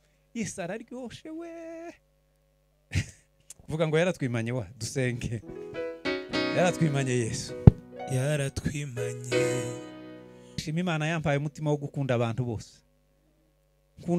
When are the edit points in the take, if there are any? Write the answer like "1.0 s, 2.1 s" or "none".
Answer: 10.6 s